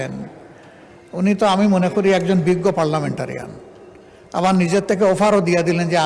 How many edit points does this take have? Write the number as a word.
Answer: zero